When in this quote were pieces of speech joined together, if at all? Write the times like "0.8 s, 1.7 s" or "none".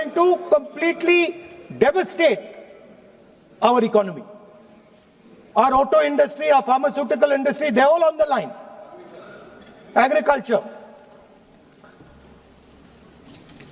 none

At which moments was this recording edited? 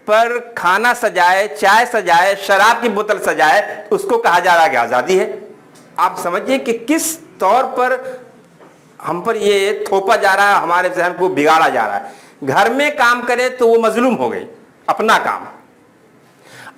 none

